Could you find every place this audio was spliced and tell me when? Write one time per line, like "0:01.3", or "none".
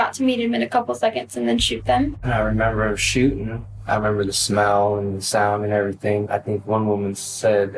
0:02.2
0:06.3